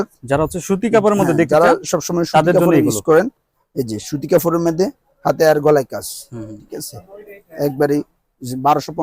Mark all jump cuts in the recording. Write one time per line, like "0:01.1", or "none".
none

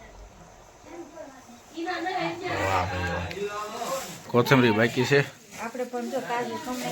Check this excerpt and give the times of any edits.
0:04.3

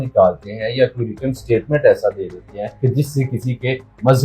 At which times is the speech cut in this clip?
0:02.7

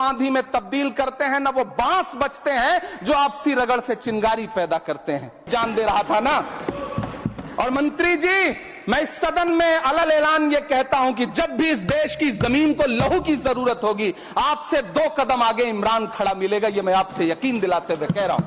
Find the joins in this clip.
0:05.5

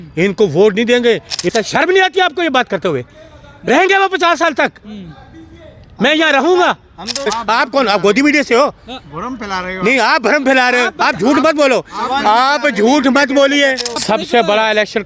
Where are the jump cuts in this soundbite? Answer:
0:01.5
0:07.3
0:14.0

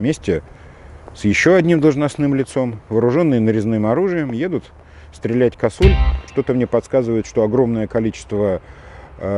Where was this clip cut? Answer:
0:06.3

